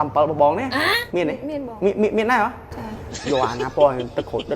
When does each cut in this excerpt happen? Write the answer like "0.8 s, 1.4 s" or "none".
3.1 s

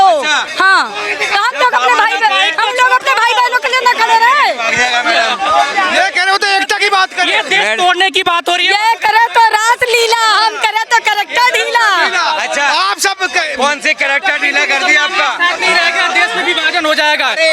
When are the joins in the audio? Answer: none

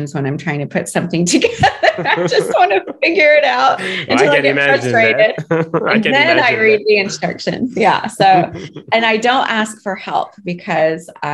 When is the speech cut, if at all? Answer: none

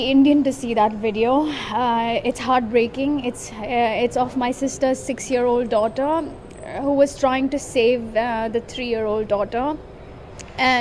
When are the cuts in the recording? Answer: none

